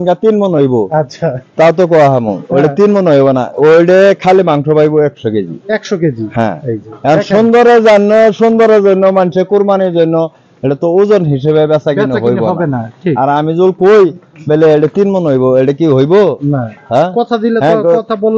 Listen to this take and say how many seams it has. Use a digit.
0